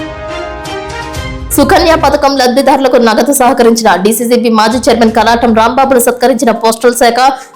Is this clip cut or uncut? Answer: cut